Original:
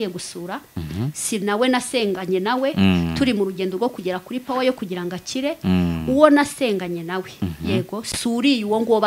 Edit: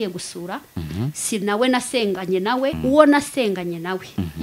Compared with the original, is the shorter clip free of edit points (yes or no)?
no